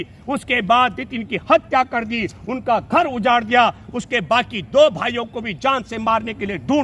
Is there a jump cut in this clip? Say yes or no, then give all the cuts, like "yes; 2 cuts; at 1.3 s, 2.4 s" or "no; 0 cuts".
no; 0 cuts